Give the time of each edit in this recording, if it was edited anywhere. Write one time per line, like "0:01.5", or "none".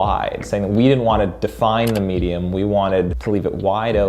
0:03.2

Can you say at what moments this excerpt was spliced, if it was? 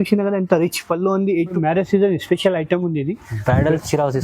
0:01.5

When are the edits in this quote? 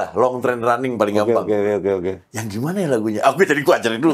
none

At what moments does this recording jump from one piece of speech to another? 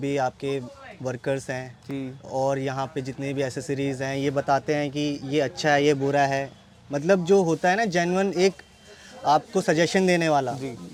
none

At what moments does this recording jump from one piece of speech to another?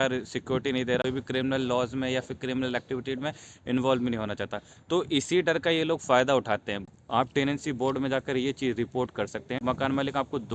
0:01.0
0:06.8
0:09.6

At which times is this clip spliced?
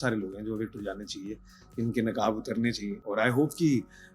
none

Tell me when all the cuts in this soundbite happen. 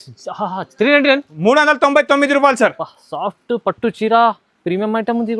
none

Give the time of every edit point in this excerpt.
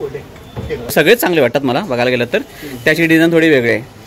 0:01.1

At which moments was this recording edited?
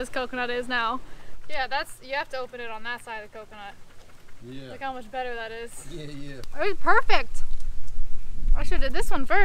0:01.2
0:06.4

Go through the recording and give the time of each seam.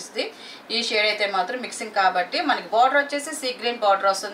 none

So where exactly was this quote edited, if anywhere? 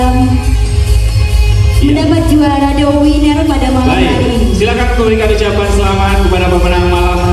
none

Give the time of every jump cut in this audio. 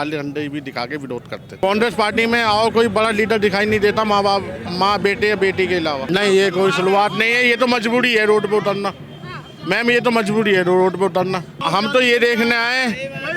0:01.5
0:06.0
0:11.5

